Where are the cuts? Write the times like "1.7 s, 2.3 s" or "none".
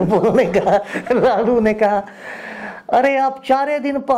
none